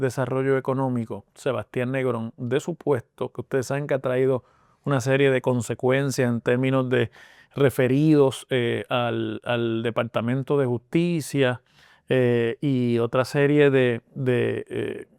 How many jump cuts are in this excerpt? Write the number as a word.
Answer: zero